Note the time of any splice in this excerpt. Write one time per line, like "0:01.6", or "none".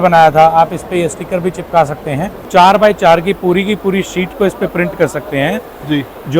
0:02.3